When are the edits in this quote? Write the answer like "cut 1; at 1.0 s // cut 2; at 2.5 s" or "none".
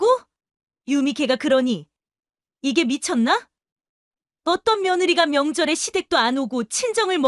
none